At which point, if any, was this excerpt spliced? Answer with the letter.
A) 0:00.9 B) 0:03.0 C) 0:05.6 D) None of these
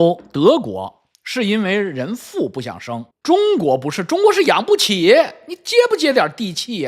B